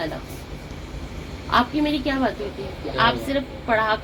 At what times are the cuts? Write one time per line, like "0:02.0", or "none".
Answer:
none